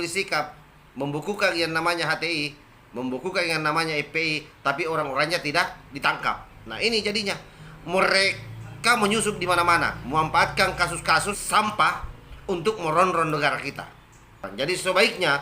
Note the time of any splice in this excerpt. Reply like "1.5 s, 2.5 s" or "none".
11.4 s, 14.5 s